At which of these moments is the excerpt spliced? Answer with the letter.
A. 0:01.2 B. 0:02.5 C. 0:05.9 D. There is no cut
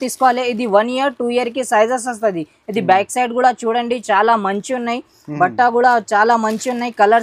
D